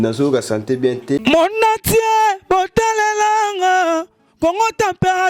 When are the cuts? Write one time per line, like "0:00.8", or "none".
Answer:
0:01.2